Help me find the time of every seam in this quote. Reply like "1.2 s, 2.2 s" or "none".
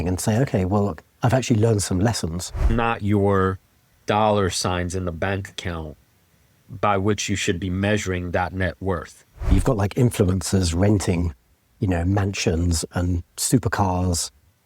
2.6 s, 9.5 s